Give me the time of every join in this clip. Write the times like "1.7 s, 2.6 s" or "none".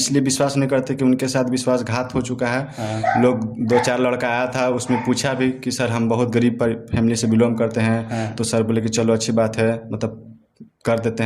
none